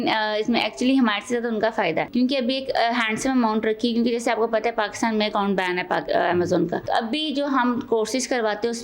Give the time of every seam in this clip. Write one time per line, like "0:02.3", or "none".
0:02.1
0:06.8